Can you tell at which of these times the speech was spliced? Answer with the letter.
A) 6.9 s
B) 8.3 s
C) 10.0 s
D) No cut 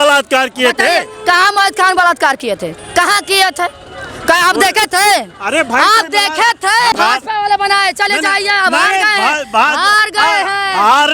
A